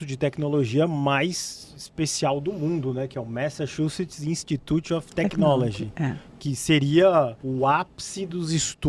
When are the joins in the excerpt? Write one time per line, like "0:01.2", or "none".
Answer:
0:07.4